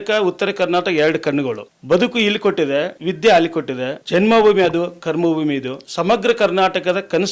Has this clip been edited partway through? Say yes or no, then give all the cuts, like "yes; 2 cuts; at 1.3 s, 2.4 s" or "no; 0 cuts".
yes; 4 cuts; at 1.7 s, 2.9 s, 4.0 s, 5.8 s